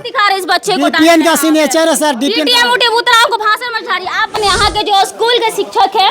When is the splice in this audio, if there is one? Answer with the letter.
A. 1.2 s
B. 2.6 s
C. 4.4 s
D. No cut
C